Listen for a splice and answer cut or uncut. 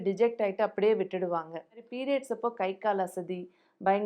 cut